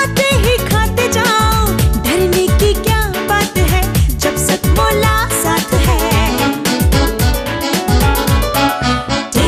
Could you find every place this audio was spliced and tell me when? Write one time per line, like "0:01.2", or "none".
none

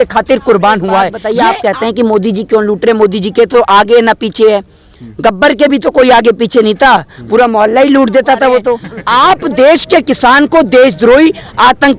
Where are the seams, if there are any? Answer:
0:01.2
0:08.9

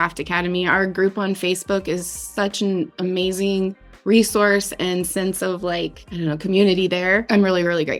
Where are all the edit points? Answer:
none

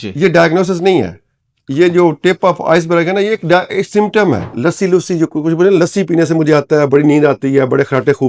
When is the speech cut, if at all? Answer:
0:04.5

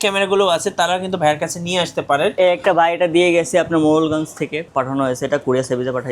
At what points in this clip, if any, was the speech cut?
0:02.4
0:04.6

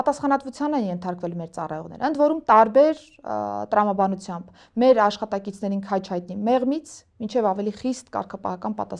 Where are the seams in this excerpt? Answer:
none

